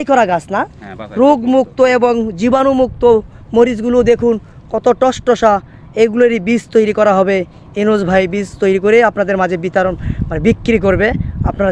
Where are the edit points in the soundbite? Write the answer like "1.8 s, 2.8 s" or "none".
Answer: none

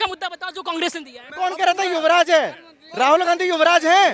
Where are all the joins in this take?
1.2 s

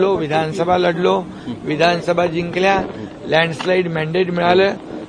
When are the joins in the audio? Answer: none

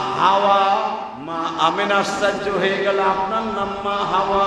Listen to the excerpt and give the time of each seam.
1.1 s

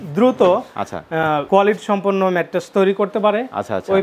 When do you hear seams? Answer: none

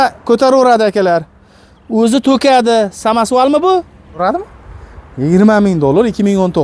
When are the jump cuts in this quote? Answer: 4.2 s

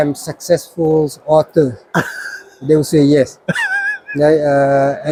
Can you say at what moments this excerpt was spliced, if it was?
none

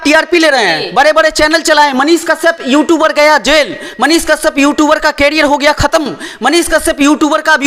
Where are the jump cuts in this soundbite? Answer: none

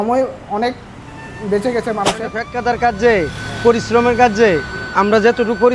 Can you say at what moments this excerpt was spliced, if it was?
2.5 s

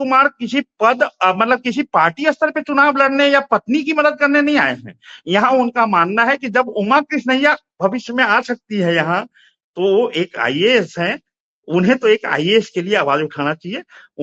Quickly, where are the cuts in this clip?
none

